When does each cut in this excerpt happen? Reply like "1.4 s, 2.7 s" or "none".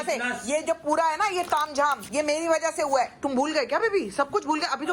none